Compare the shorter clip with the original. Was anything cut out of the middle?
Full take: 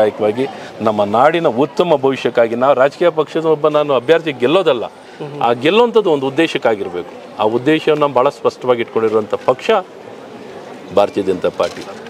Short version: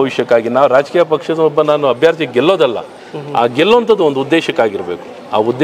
no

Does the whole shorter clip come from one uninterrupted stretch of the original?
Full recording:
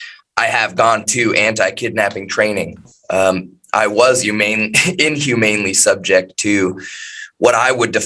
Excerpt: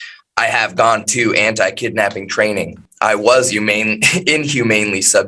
no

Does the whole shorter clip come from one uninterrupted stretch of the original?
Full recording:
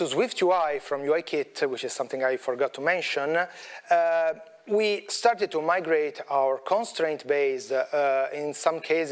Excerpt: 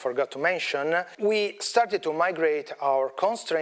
no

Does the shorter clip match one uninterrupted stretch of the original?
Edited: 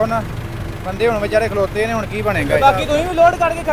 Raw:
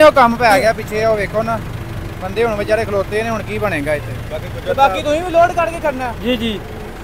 no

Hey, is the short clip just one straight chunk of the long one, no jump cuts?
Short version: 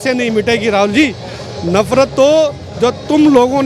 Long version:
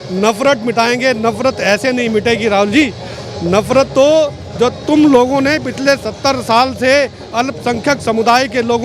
yes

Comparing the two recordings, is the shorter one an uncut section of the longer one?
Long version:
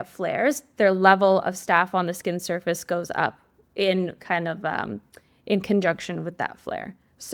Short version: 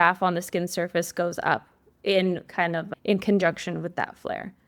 no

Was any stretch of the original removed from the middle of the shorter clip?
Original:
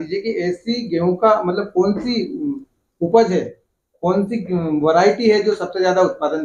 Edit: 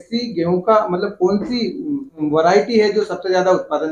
yes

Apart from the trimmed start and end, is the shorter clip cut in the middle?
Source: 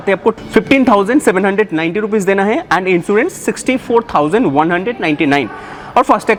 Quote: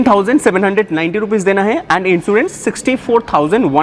no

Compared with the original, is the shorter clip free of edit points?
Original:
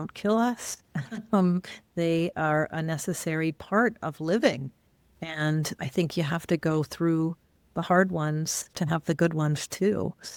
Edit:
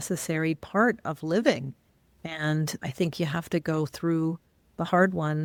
yes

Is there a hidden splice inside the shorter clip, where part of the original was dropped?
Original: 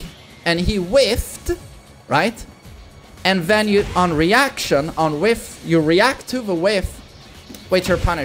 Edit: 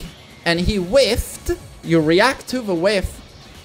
yes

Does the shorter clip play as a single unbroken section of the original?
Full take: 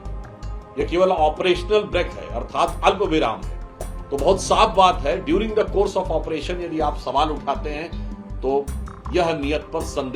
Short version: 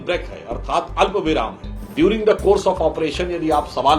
no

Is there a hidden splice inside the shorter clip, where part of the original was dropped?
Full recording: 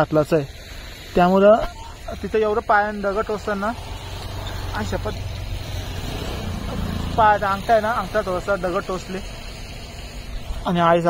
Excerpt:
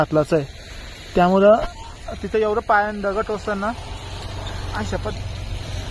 no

